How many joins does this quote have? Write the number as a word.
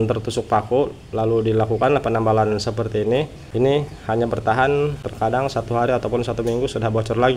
two